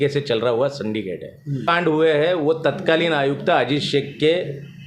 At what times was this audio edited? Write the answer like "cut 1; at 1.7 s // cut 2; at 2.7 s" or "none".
cut 1; at 1.7 s